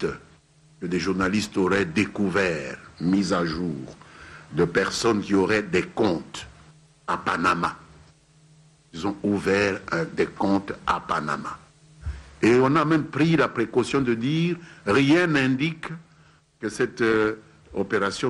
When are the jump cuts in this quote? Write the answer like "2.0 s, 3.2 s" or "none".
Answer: 14.9 s